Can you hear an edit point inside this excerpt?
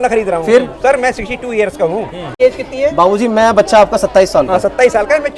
yes; 1 cut; at 2.3 s

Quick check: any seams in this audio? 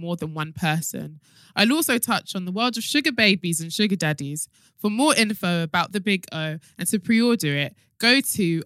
no; 0 cuts

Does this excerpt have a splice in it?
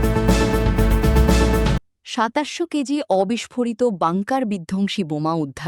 no; 0 cuts

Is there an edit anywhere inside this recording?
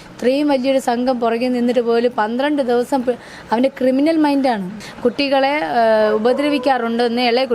yes; 1 cut; at 4.8 s

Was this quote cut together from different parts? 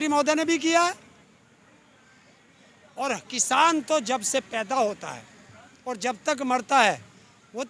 no; 0 cuts

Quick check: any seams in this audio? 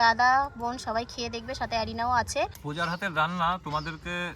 yes; 1 cut; at 2.6 s

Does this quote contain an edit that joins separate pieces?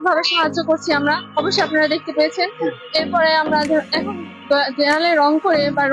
no; 0 cuts

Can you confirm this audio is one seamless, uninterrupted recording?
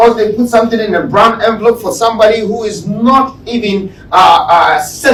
yes; 0 cuts

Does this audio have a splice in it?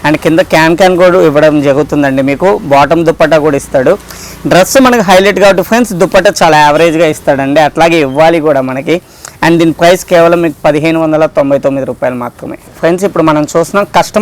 no; 0 cuts

